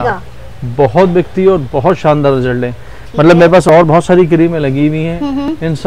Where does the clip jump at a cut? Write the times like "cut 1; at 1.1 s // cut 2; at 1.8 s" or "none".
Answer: none